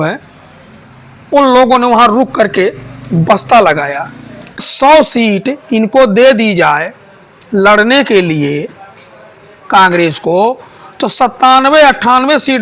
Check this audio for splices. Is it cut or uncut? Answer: cut